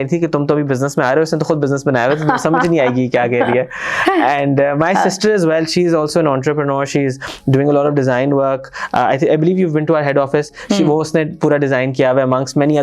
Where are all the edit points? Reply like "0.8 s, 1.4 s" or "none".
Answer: none